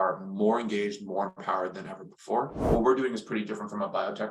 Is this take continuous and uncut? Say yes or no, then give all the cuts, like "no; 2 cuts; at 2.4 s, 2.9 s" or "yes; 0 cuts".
no; 1 cut; at 2.6 s